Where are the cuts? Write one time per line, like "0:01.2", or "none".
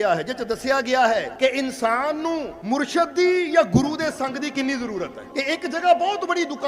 0:01.3
0:02.5
0:05.2